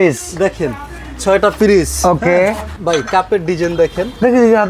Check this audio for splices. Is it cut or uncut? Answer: cut